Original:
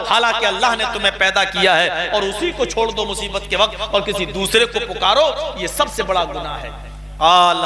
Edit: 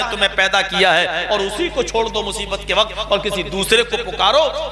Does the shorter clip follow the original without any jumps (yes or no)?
yes